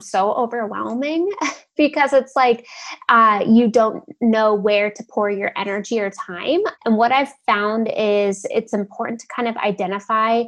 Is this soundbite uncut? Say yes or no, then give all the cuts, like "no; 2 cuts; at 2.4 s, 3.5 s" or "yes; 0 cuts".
no; 1 cut; at 6.8 s